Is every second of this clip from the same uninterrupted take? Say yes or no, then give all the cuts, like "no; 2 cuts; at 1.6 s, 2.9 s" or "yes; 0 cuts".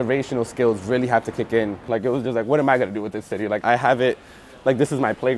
no; 2 cuts; at 1.8 s, 3.6 s